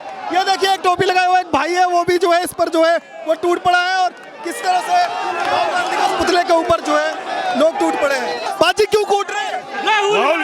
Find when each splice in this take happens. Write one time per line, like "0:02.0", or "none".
0:08.4